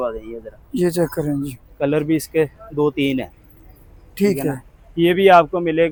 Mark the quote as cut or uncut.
uncut